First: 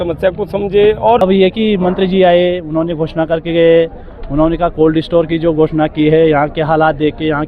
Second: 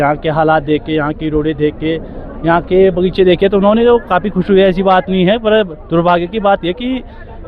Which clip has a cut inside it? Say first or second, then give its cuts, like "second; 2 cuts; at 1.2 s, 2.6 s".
first; 1 cut; at 1.2 s